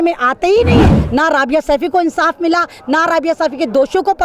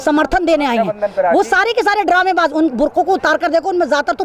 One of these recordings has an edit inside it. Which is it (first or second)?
first